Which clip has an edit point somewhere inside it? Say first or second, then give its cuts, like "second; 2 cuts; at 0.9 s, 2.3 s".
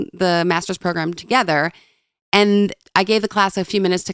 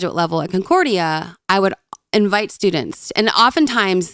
first; 1 cut; at 2.8 s